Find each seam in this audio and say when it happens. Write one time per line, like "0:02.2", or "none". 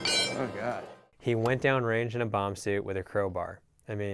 0:01.1